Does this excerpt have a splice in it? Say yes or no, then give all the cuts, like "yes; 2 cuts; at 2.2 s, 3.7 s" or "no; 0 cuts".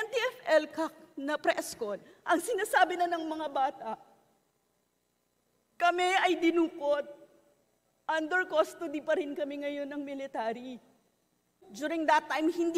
yes; 1 cut; at 11.5 s